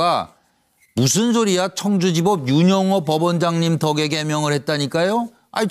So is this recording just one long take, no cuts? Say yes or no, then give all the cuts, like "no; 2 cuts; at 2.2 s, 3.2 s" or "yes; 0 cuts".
yes; 0 cuts